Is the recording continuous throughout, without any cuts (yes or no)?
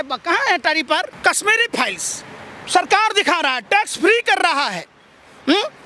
no